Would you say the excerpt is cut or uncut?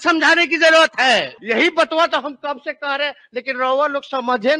cut